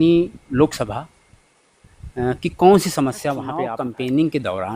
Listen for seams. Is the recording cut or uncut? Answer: cut